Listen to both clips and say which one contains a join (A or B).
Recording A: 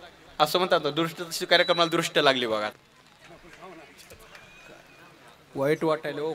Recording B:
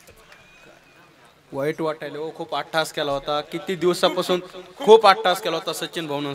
A